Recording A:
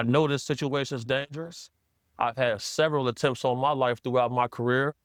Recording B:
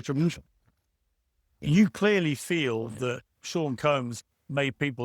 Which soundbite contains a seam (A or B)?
B